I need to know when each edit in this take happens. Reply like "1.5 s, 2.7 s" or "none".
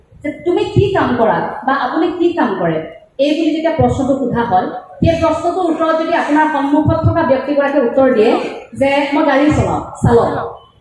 none